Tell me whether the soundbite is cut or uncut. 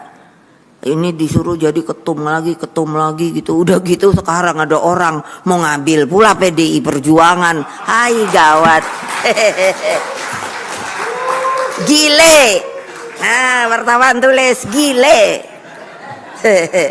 uncut